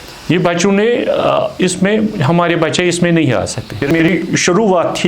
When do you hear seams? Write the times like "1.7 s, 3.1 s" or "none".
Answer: 3.9 s